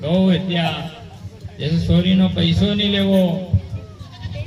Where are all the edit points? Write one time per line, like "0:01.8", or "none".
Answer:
none